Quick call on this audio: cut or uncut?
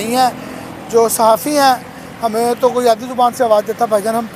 uncut